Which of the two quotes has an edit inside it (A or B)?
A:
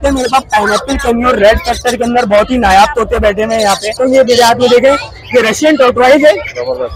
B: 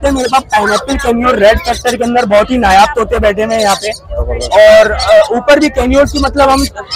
A